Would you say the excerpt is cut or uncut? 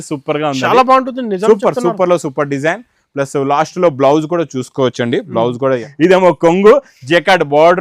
cut